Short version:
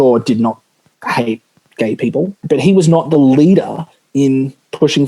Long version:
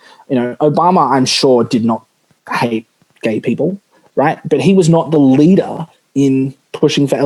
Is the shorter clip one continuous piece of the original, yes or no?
no